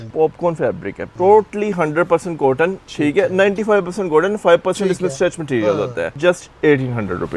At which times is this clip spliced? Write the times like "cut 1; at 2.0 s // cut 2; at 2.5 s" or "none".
cut 1; at 1.0 s // cut 2; at 6.2 s